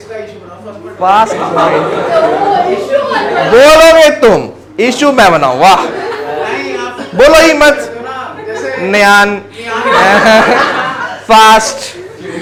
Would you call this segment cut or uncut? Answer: uncut